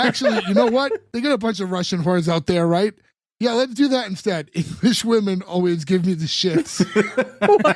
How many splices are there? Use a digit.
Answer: 1